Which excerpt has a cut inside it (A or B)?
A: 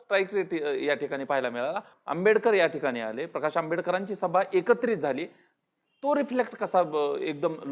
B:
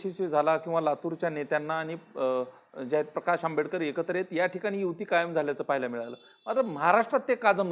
A